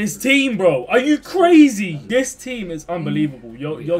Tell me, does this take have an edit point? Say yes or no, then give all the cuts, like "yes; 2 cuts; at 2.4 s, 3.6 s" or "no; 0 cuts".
yes; 1 cut; at 2.0 s